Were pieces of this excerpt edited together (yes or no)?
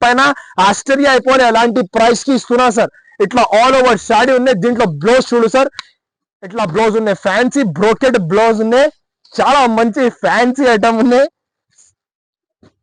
no